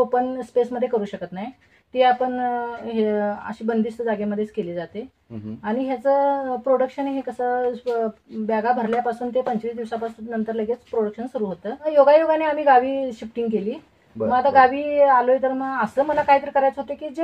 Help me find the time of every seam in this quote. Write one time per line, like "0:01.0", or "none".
0:11.9